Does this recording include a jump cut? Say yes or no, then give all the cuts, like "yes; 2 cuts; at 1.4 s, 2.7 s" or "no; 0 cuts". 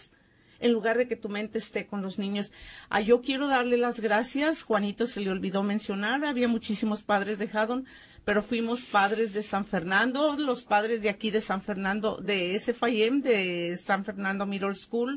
yes; 1 cut; at 8.3 s